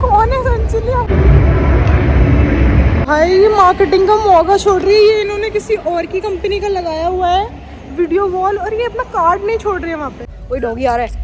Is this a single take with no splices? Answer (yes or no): no